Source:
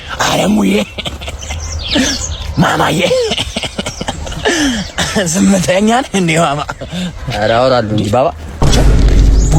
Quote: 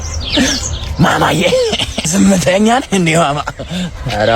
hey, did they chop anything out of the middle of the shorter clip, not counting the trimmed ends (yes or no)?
yes